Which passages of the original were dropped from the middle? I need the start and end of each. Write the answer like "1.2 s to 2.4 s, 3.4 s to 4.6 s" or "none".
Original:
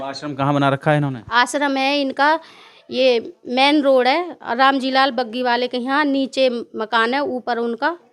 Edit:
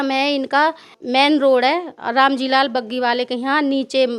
2.6 s to 3.4 s